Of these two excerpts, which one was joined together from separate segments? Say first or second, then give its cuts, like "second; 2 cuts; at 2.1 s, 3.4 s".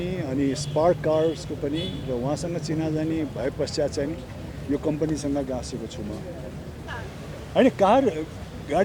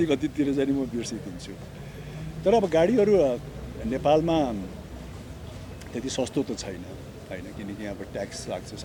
first; 1 cut; at 6.8 s